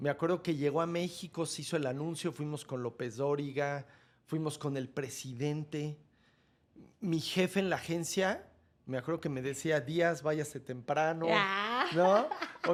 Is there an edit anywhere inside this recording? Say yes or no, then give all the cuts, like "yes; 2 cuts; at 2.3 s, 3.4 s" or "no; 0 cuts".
no; 0 cuts